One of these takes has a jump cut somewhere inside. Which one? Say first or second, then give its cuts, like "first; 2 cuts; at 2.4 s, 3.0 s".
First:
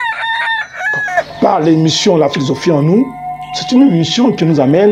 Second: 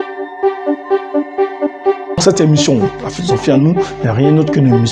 first; 1 cut; at 1.1 s